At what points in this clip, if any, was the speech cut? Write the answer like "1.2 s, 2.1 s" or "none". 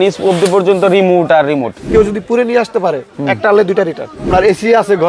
1.9 s, 4.2 s